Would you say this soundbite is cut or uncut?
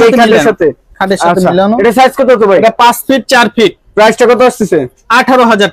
uncut